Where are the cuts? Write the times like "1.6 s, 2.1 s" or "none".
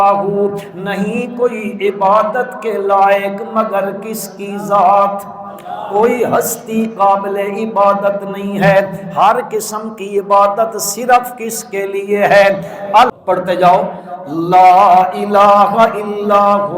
13.1 s